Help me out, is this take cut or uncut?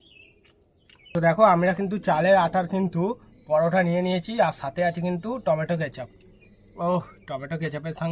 cut